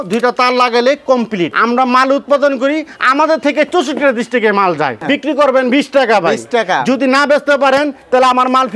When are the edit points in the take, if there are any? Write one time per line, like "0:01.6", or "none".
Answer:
0:01.5
0:05.0